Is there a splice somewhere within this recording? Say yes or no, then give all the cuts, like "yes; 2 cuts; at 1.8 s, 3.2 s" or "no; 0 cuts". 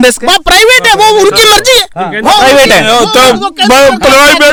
no; 0 cuts